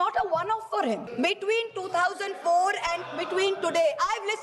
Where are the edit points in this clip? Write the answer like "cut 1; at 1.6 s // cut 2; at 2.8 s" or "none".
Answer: cut 1; at 1.1 s